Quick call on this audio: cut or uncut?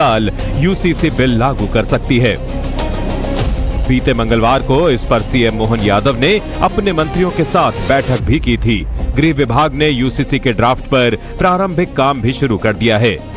uncut